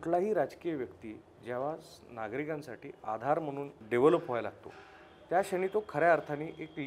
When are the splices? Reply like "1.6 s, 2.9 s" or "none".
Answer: 3.8 s